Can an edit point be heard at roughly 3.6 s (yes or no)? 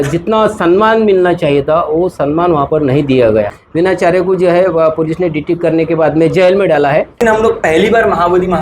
yes